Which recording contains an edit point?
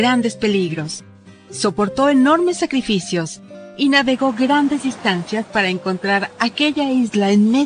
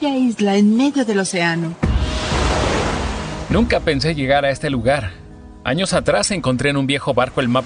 second; 1 cut; at 2.1 s

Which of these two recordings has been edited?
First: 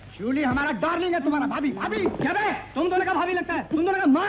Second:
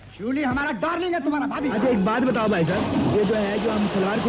second; 1 cut; at 1.7 s

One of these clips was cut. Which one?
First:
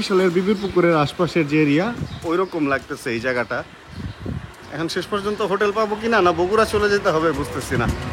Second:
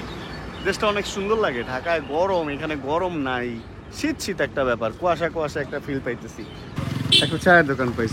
second; 1 cut; at 6.7 s

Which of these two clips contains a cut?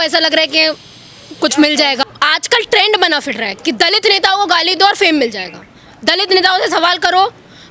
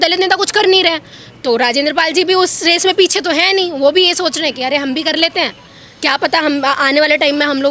first; 1 cut; at 2.1 s

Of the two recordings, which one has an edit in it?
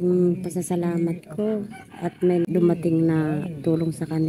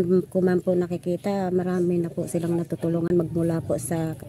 first; 1 cut; at 2.4 s

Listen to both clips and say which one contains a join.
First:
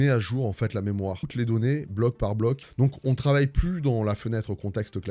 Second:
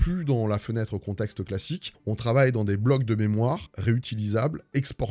first; 2 cuts; at 1.2 s, 2.6 s

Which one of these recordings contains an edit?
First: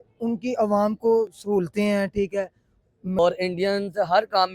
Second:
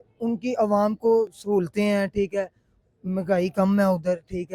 first; 1 cut; at 3.2 s

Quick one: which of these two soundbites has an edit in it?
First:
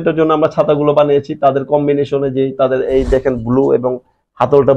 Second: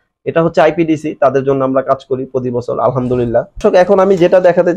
second; 1 cut; at 3.6 s

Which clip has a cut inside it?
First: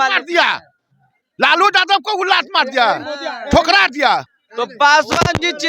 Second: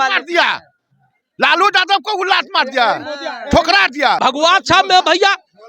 second; 1 cut; at 4.2 s

